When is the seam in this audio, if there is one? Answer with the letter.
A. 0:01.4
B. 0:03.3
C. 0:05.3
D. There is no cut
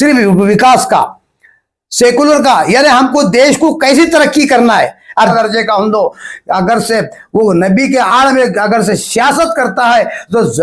C